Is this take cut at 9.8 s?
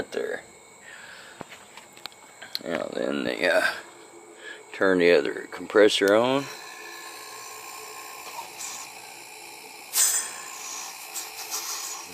yes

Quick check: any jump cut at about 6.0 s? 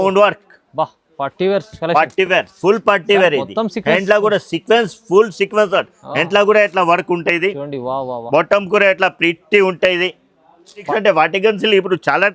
no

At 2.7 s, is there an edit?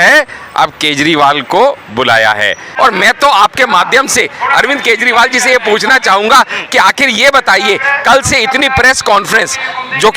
yes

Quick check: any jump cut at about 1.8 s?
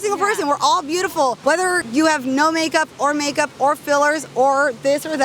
yes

